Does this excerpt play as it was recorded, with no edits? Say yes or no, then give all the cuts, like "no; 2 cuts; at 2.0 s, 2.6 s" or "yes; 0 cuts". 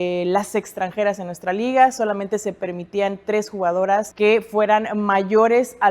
no; 1 cut; at 4.1 s